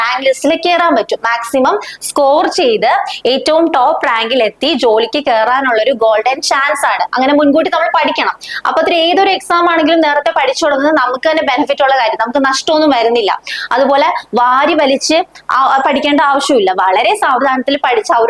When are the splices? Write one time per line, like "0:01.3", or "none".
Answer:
none